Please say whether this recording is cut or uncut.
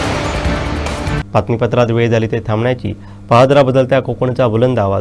uncut